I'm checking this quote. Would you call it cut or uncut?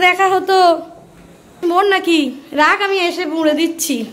cut